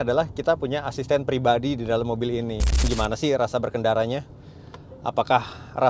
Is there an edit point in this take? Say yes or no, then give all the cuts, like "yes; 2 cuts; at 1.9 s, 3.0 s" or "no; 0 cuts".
yes; 1 cut; at 2.9 s